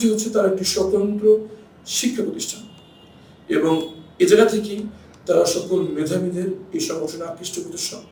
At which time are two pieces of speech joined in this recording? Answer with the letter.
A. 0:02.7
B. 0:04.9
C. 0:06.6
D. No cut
D